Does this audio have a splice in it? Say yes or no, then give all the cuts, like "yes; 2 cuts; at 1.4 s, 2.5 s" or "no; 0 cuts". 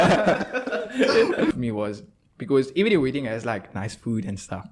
yes; 1 cut; at 1.5 s